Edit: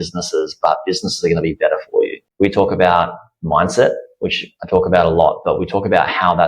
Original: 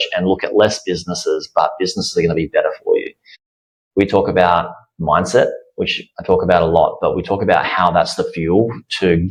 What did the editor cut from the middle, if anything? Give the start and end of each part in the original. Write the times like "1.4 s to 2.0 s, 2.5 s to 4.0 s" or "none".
3.2 s to 3.8 s